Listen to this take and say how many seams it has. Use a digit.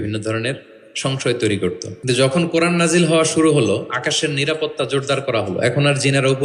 1